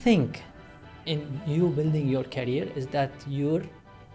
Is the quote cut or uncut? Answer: uncut